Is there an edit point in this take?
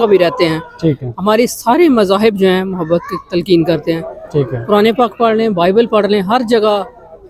no; 0 cuts

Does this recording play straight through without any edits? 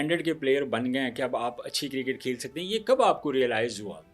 yes; 0 cuts

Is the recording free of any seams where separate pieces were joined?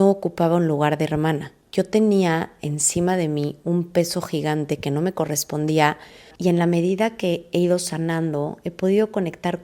no; 2 cuts; at 1.6 s, 6.3 s

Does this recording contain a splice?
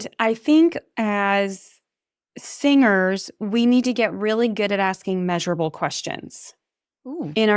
no; 0 cuts

